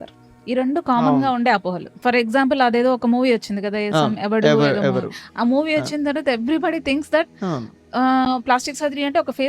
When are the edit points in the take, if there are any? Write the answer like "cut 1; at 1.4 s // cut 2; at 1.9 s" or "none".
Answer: cut 1; at 2.0 s